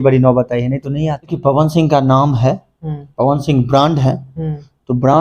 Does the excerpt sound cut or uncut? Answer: cut